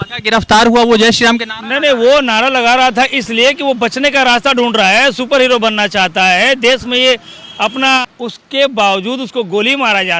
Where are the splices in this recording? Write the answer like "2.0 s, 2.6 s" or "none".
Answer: 8.0 s